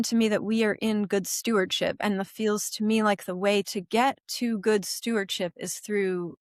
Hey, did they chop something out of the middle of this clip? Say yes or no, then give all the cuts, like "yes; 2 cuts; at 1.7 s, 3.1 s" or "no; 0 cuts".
no; 0 cuts